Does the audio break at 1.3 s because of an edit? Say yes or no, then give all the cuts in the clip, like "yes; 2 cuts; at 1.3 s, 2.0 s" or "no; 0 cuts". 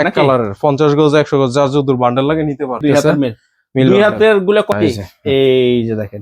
no; 2 cuts; at 2.8 s, 4.7 s